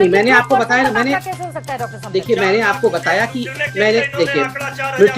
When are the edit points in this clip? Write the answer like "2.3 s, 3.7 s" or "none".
none

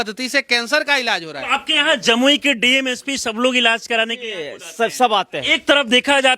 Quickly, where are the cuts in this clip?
1.4 s, 5.5 s

